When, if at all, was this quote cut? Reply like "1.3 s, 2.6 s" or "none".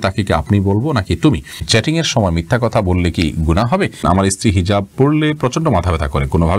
1.6 s, 4.0 s